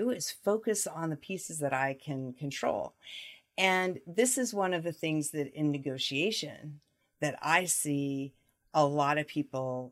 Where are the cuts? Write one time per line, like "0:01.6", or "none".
none